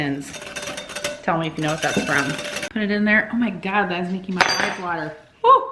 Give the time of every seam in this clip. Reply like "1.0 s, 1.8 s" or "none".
2.5 s